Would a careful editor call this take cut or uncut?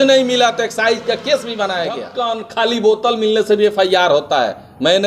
cut